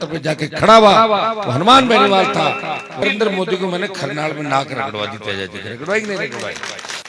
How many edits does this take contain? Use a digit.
1